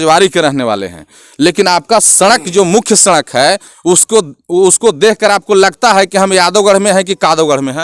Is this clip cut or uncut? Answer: uncut